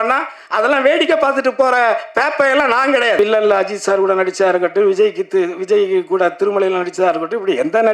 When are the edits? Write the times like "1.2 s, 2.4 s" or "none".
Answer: 3.2 s